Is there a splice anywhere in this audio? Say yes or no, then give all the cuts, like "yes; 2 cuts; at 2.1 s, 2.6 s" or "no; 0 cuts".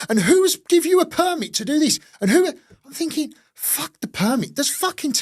no; 0 cuts